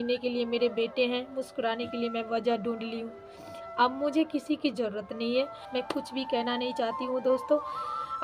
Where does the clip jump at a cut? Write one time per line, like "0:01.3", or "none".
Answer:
0:05.6